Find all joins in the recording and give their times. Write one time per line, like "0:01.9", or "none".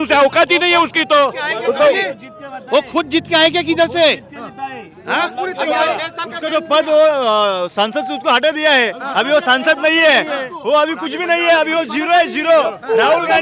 none

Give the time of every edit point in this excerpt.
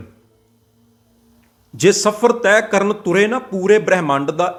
none

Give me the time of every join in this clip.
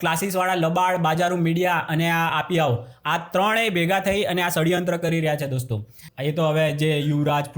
0:06.0

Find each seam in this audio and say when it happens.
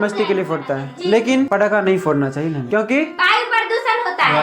0:02.6

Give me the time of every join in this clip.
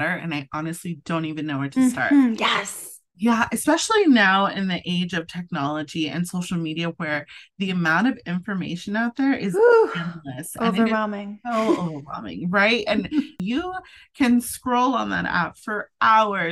0:13.4

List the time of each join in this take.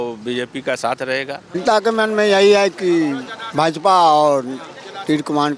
0:01.6

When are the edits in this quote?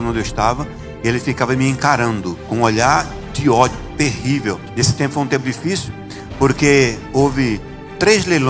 0:04.6

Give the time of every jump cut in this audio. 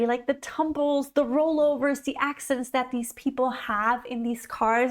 0:01.1

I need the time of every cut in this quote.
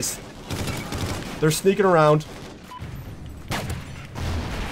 0:02.7

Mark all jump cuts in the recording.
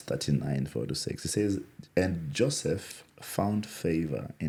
none

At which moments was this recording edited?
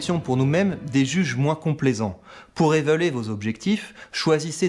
none

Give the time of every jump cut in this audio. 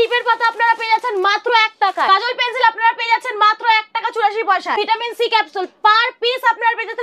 0:02.1
0:04.8

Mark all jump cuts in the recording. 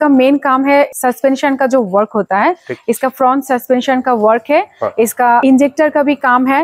0:00.9
0:05.4

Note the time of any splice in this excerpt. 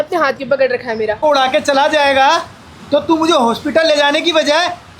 0:01.2

